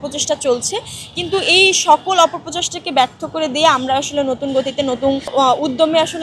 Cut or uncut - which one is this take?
uncut